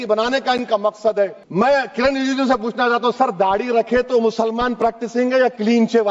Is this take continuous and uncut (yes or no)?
no